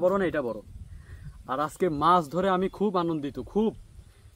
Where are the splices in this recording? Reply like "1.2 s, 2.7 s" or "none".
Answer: none